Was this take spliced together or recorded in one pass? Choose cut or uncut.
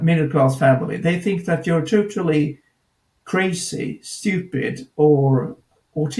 uncut